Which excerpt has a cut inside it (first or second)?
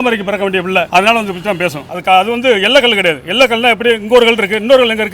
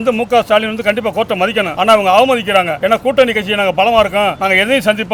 first